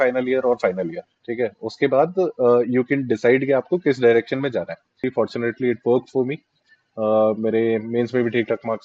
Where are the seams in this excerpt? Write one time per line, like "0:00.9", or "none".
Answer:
0:05.1